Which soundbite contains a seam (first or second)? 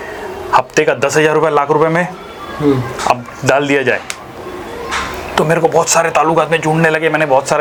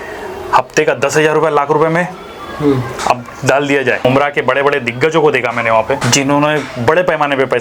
second